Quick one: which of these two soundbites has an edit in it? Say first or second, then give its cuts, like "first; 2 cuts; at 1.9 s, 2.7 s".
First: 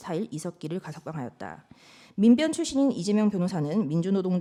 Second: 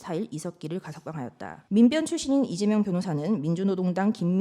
second; 1 cut; at 1.5 s